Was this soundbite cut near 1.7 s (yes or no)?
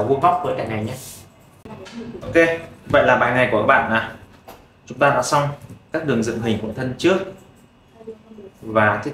yes